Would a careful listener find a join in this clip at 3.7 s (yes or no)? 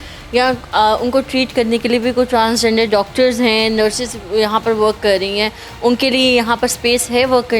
no